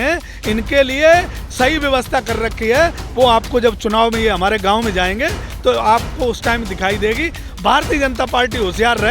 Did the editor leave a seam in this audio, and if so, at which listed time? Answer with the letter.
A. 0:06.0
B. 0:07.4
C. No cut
B